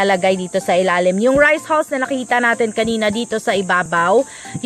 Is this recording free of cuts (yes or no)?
yes